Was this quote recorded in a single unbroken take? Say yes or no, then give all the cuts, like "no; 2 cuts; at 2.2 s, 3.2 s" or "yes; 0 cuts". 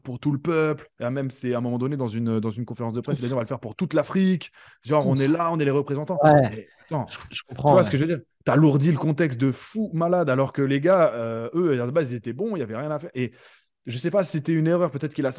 yes; 0 cuts